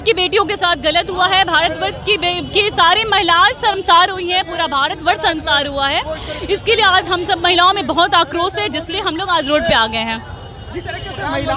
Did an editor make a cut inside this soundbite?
no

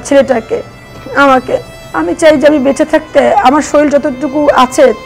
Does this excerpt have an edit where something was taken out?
yes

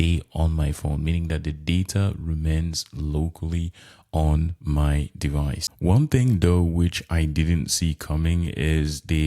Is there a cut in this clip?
no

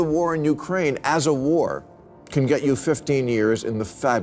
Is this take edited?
no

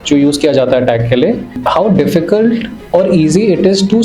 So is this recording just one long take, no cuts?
no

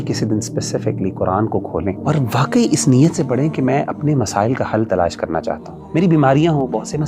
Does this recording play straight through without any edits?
no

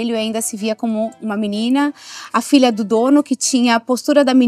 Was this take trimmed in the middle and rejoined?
no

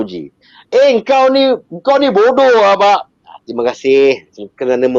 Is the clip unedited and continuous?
yes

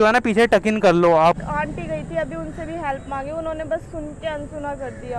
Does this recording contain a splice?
yes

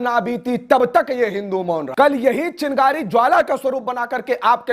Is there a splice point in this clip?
yes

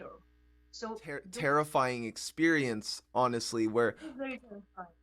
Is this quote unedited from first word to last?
no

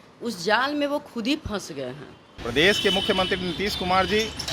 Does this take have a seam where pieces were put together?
yes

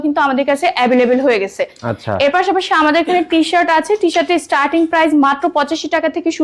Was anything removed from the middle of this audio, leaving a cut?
no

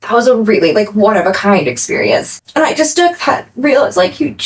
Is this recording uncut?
no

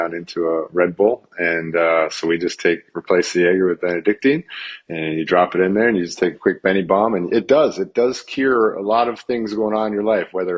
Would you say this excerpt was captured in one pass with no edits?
yes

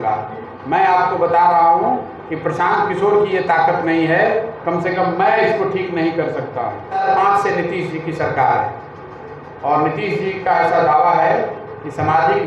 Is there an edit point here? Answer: yes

